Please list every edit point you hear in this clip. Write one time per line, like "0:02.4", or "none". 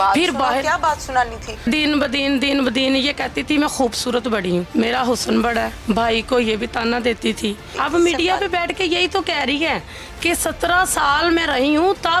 0:01.6
0:04.7
0:05.7
0:07.7